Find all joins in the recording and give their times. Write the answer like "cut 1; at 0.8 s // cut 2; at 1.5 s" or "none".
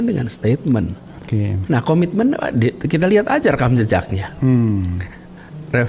none